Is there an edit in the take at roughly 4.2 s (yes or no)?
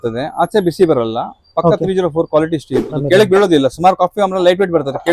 no